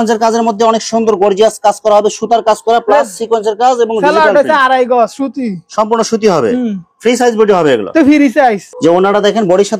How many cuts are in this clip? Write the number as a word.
zero